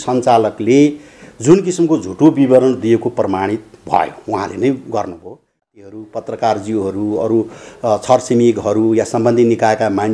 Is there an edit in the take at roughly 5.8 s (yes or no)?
yes